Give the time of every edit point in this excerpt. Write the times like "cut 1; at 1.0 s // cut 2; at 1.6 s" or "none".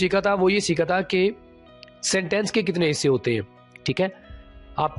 none